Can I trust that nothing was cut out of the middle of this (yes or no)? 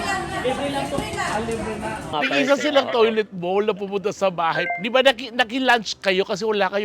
no